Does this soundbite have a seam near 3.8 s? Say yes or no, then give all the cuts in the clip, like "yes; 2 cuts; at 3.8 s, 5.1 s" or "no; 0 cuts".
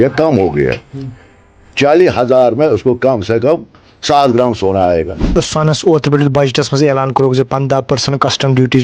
no; 1 cut; at 5.3 s